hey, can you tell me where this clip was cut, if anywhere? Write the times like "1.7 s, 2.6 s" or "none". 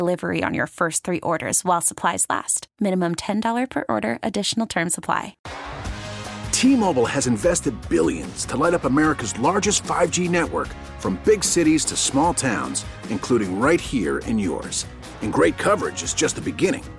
5.3 s